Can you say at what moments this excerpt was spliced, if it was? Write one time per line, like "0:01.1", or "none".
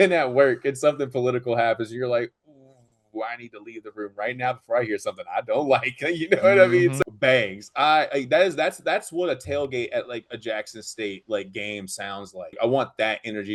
0:07.0
0:12.6